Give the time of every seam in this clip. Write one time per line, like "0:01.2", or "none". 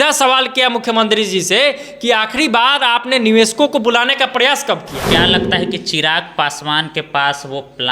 0:05.0